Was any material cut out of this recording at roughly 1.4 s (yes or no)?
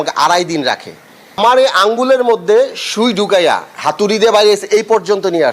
yes